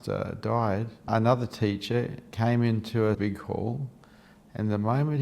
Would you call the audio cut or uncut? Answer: cut